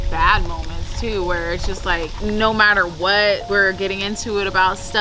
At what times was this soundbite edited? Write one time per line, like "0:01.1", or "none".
0:02.1
0:03.4